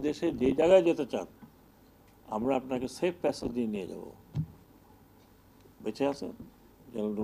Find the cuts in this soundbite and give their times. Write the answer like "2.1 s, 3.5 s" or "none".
none